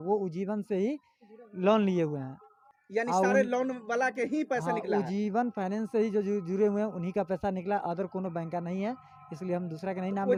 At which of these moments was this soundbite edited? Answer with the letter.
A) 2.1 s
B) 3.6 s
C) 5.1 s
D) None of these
D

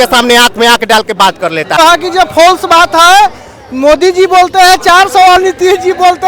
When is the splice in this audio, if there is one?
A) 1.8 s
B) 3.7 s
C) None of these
A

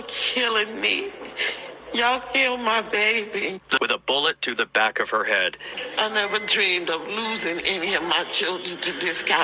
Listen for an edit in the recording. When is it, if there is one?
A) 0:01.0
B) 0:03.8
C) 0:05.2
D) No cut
B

